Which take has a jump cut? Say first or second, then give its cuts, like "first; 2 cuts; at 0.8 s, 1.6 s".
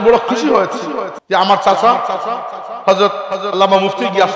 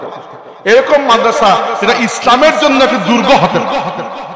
first; 1 cut; at 1.1 s